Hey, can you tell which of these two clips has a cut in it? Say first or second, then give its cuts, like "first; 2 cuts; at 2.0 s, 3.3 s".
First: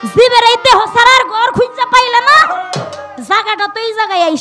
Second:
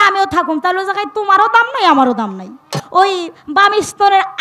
second; 1 cut; at 2.8 s